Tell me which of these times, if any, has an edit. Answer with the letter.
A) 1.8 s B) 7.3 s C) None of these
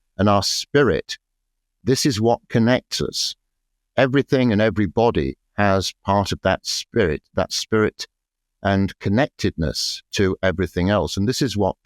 A